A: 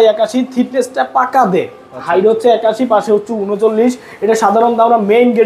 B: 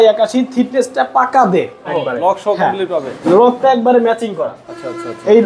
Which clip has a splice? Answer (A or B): B